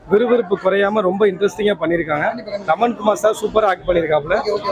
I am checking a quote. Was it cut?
no; 0 cuts

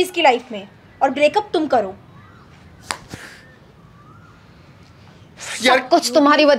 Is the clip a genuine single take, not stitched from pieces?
yes; 0 cuts

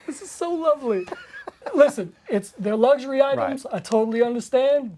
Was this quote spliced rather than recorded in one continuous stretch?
no; 0 cuts

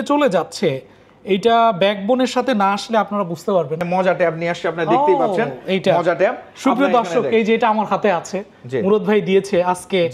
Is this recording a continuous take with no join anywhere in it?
no; 1 cut; at 3.8 s

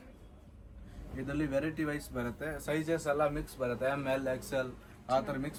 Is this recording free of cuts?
yes; 0 cuts

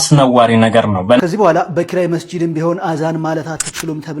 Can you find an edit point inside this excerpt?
yes; 1 cut; at 1.2 s

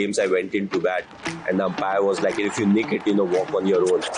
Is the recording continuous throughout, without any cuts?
yes; 0 cuts

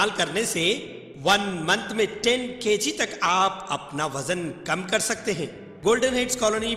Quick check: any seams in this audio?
yes; 1 cut; at 5.6 s

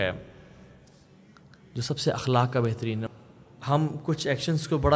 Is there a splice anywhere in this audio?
yes; 1 cut; at 3.1 s

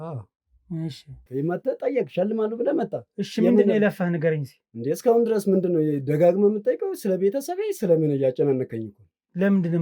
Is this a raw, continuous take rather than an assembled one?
no; 1 cut; at 1.3 s

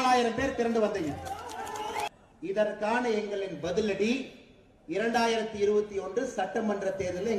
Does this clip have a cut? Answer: yes; 1 cut; at 2.1 s

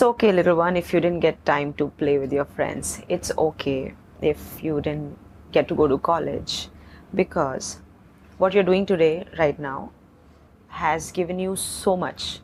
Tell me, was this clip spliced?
no; 0 cuts

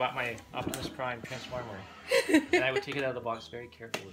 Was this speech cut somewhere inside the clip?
no; 0 cuts

